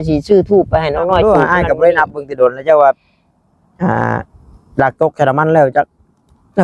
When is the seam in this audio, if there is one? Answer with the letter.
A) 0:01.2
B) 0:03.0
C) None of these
A